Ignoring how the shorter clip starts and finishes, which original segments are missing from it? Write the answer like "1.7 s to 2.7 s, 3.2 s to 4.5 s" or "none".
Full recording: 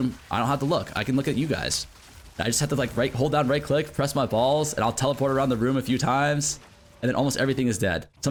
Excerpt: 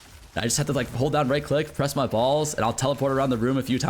2.9 s to 3.1 s